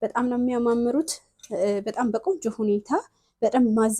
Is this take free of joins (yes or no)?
yes